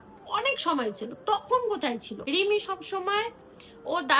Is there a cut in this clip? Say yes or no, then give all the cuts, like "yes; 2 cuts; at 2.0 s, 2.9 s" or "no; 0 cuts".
yes; 1 cut; at 2.1 s